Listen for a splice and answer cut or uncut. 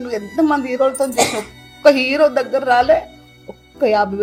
uncut